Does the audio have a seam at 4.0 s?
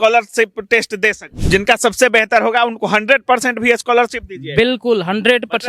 no; 1 cut; at 1.3 s

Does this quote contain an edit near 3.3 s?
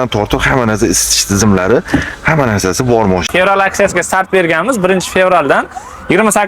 yes; 1 cut; at 3.3 s

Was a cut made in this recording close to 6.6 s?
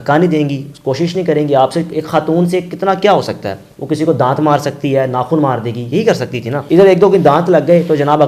yes; 1 cut; at 6.6 s

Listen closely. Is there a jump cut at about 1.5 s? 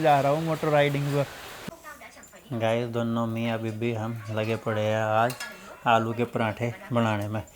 yes; 1 cut; at 1.5 s

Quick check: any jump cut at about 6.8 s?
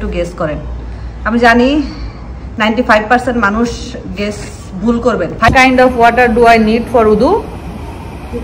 no; 1 cut; at 5.5 s

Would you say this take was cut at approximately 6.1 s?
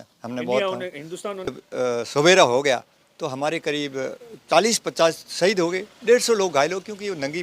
no; 1 cut; at 1.5 s

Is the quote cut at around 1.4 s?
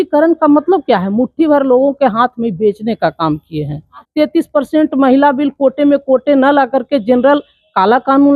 no; 1 cut; at 4.0 s

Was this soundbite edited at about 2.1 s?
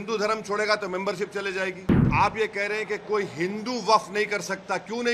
yes; 1 cut; at 2.1 s

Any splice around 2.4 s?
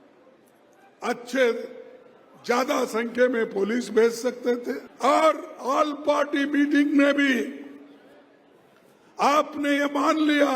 no; 1 cut; at 4.9 s

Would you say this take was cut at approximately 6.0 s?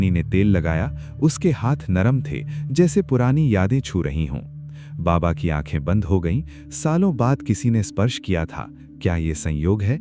no; 1 cut; at 8.9 s

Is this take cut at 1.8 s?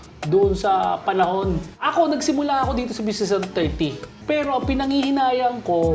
yes; 2 cuts; at 1.8 s, 4.1 s

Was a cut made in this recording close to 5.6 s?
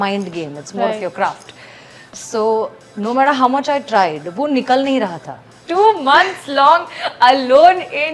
yes; 1 cut; at 5.6 s

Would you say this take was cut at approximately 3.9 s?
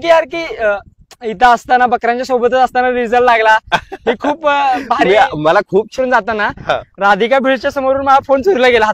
no; 1 cut; at 5.9 s

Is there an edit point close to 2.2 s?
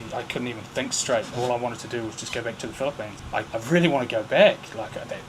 no; 1 cut; at 3.5 s

